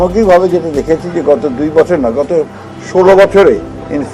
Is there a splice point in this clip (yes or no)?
no